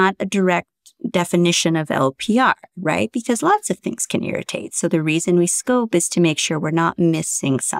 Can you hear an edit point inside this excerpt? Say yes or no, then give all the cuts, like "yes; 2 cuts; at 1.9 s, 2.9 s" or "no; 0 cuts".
no; 0 cuts